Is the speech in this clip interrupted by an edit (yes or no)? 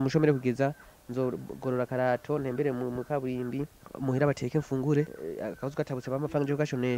yes